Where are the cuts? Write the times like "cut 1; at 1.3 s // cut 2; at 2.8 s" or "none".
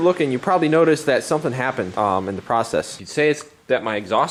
none